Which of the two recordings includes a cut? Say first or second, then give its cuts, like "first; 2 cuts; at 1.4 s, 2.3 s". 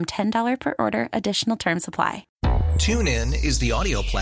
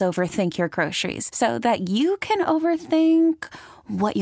first; 1 cut; at 2.3 s